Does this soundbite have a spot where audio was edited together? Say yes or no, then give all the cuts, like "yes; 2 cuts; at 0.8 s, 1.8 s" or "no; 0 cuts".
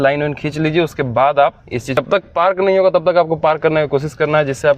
yes; 1 cut; at 2.0 s